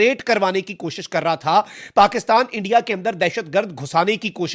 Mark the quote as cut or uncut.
uncut